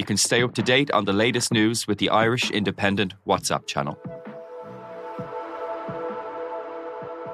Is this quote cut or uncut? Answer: uncut